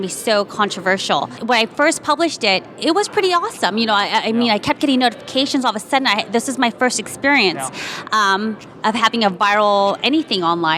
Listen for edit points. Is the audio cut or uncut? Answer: cut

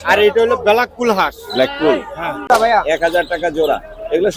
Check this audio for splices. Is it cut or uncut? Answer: cut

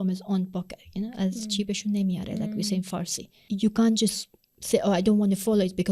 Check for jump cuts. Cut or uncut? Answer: cut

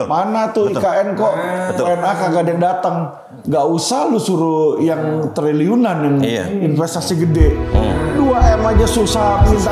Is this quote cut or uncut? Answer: uncut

